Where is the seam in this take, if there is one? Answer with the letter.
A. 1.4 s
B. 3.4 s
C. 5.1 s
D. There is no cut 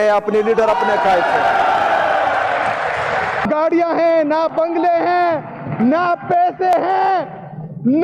B